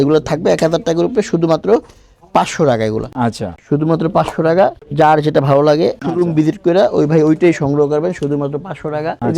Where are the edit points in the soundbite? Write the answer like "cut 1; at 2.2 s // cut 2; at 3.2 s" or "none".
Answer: none